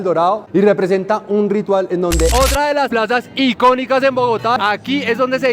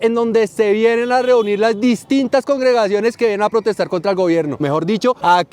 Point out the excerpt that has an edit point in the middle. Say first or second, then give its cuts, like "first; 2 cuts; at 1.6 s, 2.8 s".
first; 2 cuts; at 2.3 s, 4.6 s